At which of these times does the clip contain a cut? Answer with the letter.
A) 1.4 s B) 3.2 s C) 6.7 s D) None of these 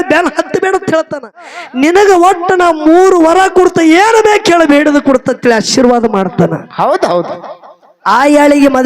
A